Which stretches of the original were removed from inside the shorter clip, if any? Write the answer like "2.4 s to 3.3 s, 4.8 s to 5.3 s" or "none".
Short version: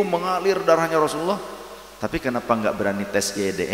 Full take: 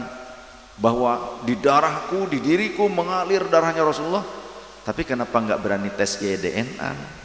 none